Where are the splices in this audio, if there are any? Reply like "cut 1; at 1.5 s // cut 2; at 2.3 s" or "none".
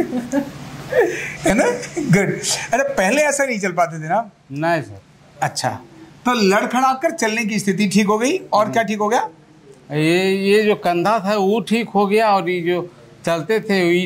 none